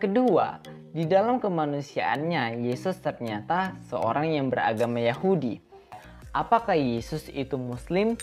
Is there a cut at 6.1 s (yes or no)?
yes